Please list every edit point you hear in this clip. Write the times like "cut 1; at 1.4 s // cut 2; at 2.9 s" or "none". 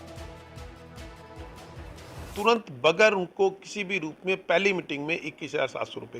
cut 1; at 2.0 s